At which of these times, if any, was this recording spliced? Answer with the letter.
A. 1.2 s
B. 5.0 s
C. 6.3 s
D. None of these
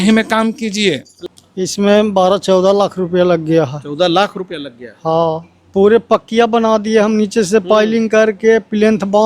A